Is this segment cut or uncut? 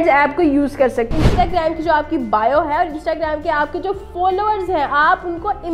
cut